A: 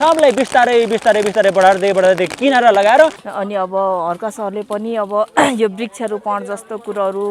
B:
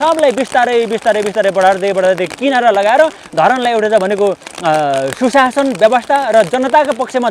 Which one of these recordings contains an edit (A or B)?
A